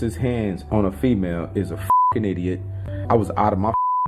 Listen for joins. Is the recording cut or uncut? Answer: uncut